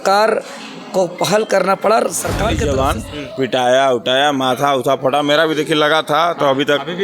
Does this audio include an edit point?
yes; 1 cut; at 2.6 s

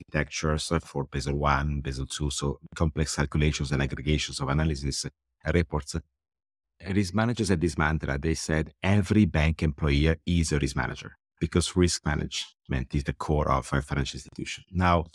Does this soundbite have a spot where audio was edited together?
yes; 1 cut; at 6.6 s

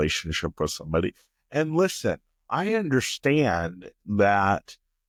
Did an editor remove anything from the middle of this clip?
no; 0 cuts

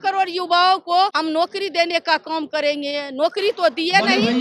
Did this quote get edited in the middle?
yes; 1 cut; at 1.2 s

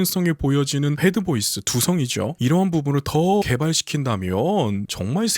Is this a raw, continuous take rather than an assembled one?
no; 1 cut; at 3.4 s

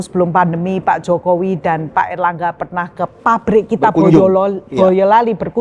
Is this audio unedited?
yes; 0 cuts

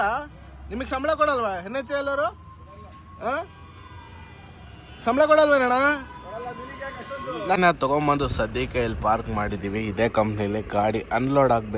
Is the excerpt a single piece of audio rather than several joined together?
no; 1 cut; at 7.6 s

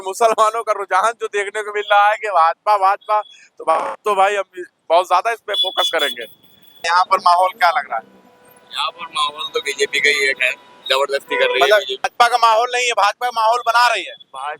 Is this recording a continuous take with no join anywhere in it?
no; 2 cuts; at 6.9 s, 12.1 s

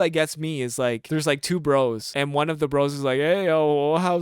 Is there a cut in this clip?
yes; 2 cuts; at 1.0 s, 2.1 s

